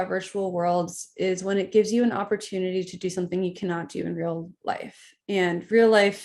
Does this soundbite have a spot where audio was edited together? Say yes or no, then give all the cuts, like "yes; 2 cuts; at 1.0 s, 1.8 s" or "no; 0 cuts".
no; 0 cuts